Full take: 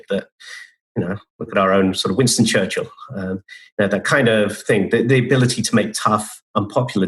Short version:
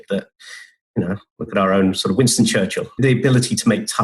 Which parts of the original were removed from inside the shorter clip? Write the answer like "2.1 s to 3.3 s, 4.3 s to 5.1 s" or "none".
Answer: 3.0 s to 5.1 s